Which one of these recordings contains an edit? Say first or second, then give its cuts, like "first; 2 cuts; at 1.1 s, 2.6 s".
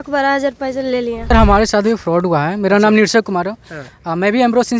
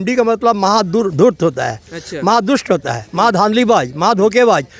first; 1 cut; at 1.3 s